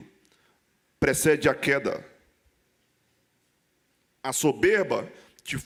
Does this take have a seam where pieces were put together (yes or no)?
no